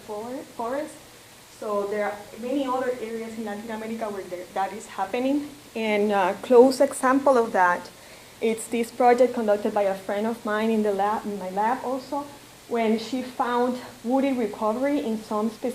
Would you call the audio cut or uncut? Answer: cut